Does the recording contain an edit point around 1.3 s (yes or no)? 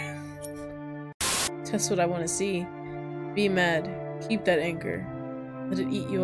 yes